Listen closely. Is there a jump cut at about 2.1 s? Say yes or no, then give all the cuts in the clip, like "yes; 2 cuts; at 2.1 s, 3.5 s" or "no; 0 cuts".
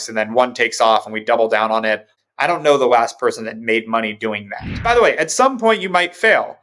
yes; 2 cuts; at 2.1 s, 4.8 s